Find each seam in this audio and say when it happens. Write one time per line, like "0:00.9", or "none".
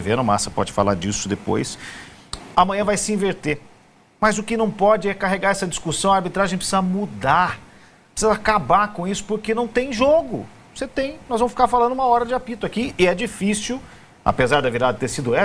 0:11.0